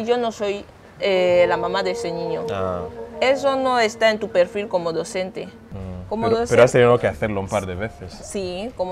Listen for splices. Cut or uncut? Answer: uncut